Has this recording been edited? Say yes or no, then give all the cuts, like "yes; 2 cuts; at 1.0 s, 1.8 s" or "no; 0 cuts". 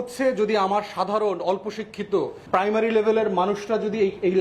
yes; 1 cut; at 2.4 s